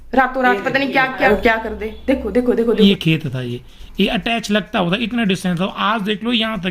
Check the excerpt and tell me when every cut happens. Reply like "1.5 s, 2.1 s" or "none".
1.2 s, 2.7 s

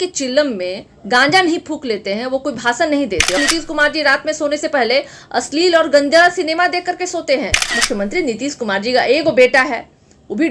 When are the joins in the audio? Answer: 3.4 s, 7.7 s

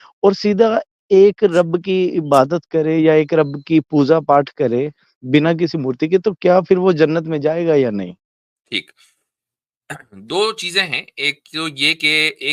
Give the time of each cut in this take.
none

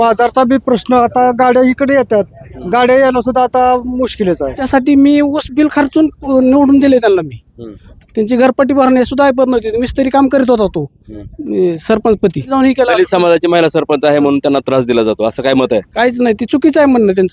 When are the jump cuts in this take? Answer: 4.6 s, 12.5 s

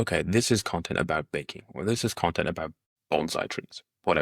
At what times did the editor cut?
2.9 s

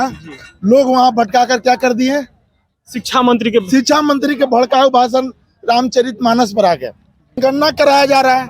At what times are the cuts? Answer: 7.4 s

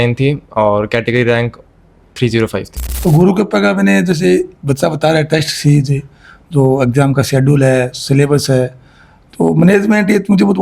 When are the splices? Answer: 2.9 s

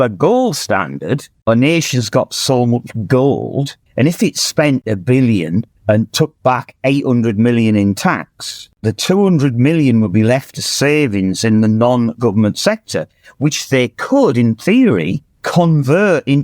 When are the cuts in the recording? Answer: 1.3 s, 4.8 s, 8.7 s

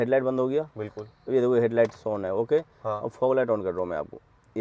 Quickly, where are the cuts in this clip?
none

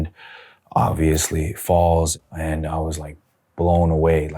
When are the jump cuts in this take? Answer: 2.3 s

